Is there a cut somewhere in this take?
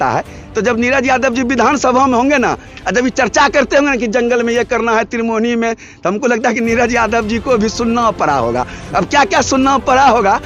no; 0 cuts

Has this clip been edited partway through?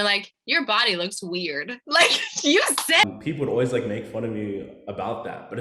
yes; 1 cut; at 3.1 s

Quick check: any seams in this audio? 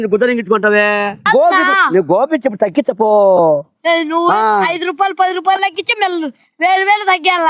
yes; 1 cut; at 1.2 s

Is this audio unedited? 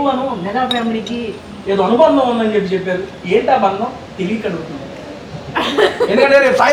yes; 0 cuts

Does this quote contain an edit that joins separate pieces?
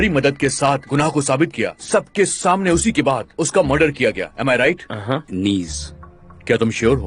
yes; 1 cut; at 5.3 s

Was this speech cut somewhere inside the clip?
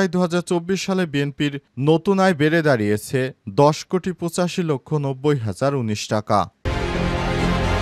yes; 1 cut; at 6.6 s

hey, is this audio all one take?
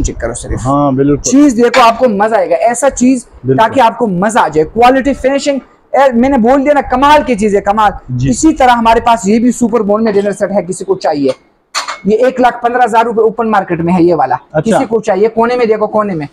yes; 0 cuts

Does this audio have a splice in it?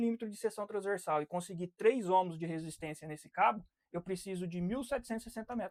no; 0 cuts

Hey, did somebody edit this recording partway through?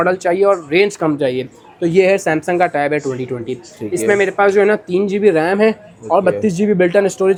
no; 0 cuts

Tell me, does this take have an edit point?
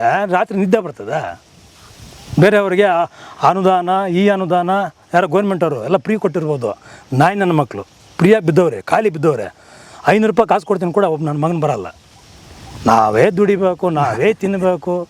no; 0 cuts

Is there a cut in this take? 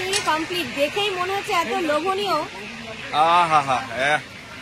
no; 0 cuts

